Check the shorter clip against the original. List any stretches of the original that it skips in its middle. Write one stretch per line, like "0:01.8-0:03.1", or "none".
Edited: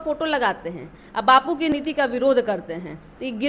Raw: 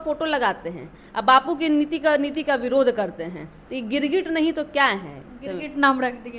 0:01.7-0:02.2

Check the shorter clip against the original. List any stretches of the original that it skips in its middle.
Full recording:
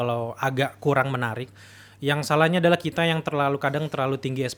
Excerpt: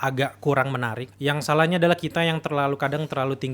0:01.4-0:01.8

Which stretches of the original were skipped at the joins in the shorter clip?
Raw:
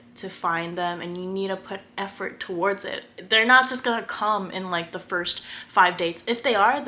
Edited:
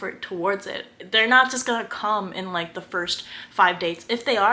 none

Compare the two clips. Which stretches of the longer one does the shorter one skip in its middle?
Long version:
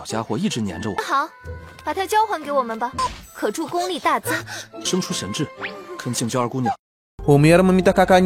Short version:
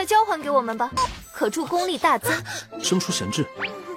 none

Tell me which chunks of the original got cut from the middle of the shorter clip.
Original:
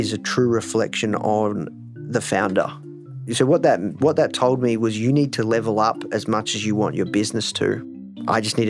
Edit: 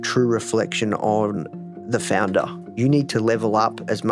0:03.0-0:05.0

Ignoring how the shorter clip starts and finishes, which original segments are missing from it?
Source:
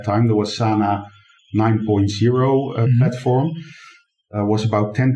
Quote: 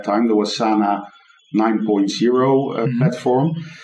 none

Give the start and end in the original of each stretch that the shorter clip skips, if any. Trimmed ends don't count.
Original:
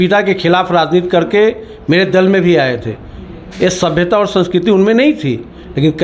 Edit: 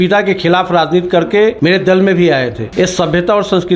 0:01.6-0:01.8
0:02.9-0:03.4

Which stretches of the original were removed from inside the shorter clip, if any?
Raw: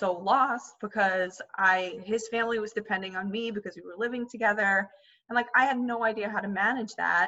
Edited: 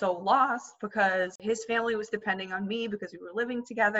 0:01.4-0:02.0

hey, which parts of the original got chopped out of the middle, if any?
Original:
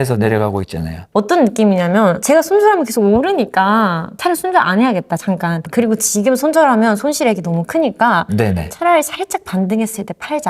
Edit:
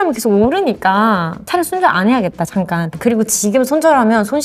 none

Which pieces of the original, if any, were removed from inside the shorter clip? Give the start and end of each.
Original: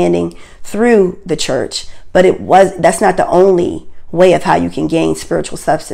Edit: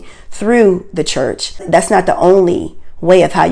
0:02.0-0:02.7

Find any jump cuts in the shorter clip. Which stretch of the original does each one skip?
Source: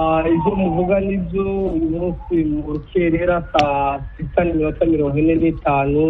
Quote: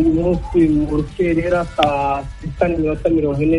none

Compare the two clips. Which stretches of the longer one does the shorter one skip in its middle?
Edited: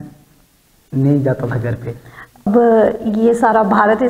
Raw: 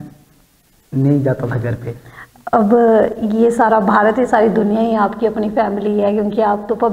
0:02.5-0:02.6

